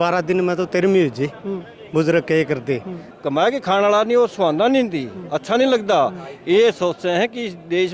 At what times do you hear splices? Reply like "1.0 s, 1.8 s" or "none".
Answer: 3.1 s